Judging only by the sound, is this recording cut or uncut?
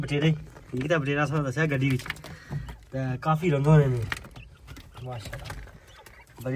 uncut